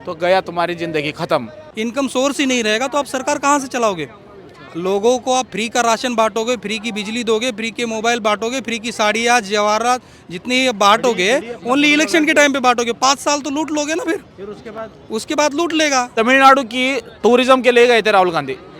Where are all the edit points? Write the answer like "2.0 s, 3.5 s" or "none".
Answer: 1.6 s, 16.1 s